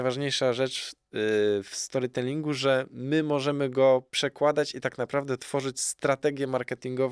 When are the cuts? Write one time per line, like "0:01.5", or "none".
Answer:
none